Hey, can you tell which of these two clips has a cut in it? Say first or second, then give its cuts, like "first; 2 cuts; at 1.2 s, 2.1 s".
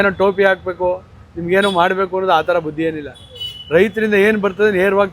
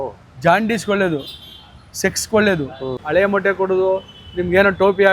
second; 1 cut; at 3.0 s